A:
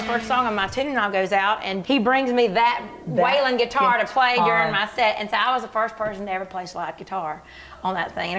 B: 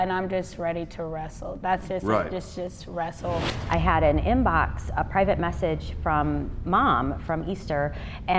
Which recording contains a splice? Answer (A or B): B